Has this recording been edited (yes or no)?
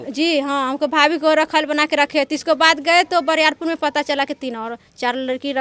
no